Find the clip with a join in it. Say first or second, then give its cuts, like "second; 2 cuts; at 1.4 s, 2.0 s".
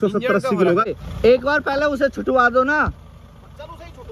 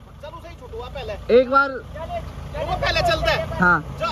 first; 1 cut; at 0.9 s